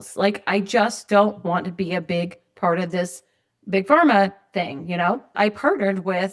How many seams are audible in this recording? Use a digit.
1